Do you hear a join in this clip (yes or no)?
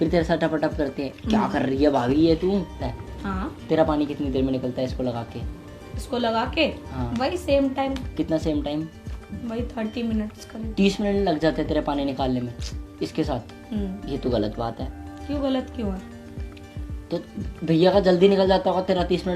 yes